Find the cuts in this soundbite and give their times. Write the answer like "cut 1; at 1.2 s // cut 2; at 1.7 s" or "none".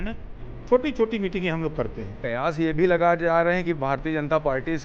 cut 1; at 2.1 s